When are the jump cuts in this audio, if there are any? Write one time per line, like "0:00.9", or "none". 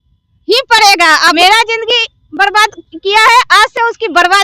0:01.3